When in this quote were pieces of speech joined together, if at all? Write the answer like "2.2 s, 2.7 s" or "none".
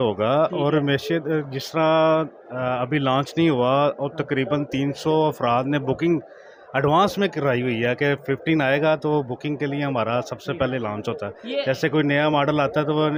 none

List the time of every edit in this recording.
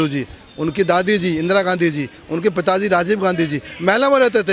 none

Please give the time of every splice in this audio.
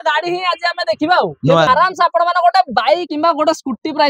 1.7 s, 3.1 s

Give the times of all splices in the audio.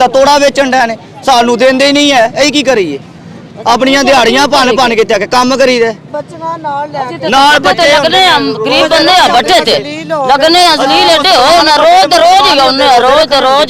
none

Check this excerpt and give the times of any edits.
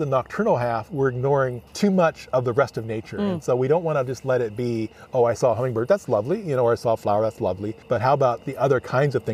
1.7 s, 7.7 s

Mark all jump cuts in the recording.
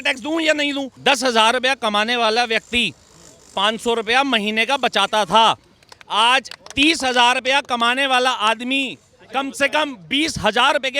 0.9 s

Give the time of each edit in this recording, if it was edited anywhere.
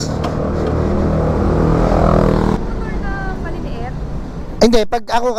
2.6 s

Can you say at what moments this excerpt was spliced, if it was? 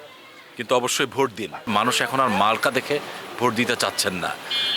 1.7 s

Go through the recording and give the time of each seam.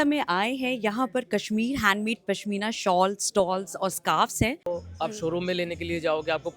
4.7 s

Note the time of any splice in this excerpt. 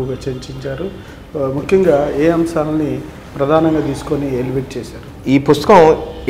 none

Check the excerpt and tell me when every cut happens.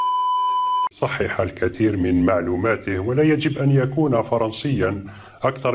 none

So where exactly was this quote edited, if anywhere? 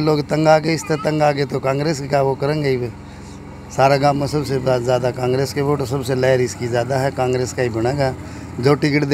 none

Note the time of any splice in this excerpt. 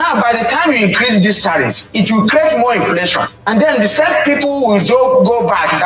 none

